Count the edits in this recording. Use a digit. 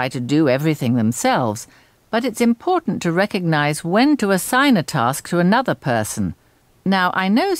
2